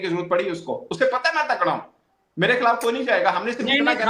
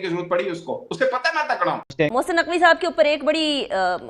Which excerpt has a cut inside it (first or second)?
second